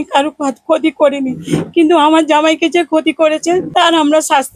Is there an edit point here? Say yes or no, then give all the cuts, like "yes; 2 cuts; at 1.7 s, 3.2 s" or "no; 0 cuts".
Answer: yes; 1 cut; at 3.7 s